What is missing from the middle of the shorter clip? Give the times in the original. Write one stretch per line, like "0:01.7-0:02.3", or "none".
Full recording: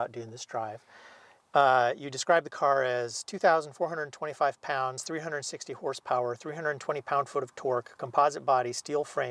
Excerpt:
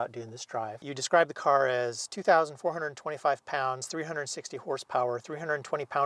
0:00.9-0:02.1